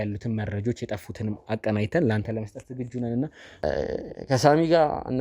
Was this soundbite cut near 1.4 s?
no; 1 cut; at 3.6 s

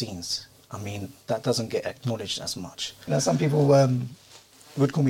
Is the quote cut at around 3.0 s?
yes; 1 cut; at 3.0 s

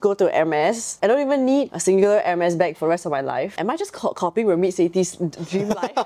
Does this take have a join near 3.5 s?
yes; 3 cuts; at 0.9 s, 1.7 s, 3.5 s

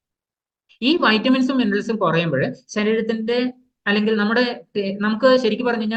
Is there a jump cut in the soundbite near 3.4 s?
no; 0 cuts

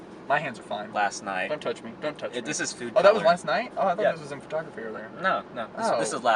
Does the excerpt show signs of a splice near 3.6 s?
no; 1 cut; at 2.2 s

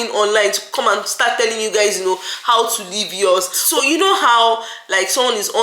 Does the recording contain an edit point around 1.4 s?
no; 1 cut; at 3.6 s

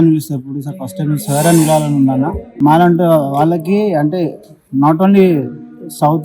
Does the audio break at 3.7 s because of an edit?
no; 1 cut; at 2.4 s

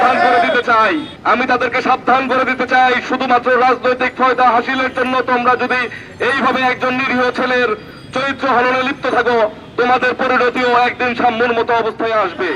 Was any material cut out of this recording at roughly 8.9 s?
no; 1 cut; at 1.1 s

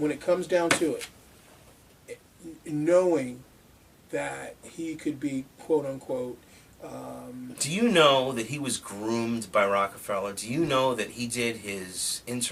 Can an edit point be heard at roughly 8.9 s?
yes; 1 cut; at 8.9 s

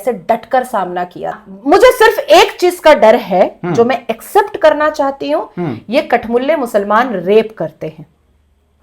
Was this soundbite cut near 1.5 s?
yes; 1 cut; at 1.5 s

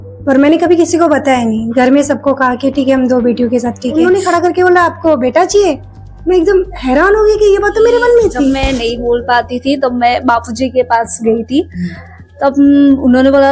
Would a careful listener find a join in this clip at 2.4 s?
no; 2 cuts; at 3.8 s, 8.5 s

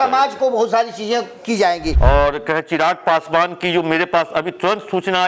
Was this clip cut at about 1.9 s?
yes; 1 cut; at 1.9 s

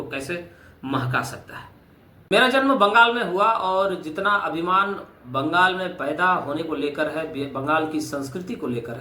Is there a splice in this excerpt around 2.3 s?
yes; 1 cut; at 2.3 s

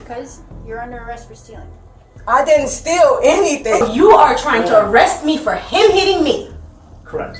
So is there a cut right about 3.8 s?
yes; 1 cut; at 3.8 s

